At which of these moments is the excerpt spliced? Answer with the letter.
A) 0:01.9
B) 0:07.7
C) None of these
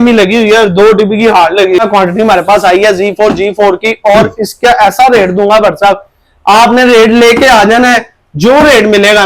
A